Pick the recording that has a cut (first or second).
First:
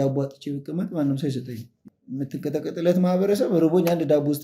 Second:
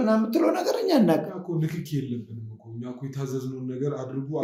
first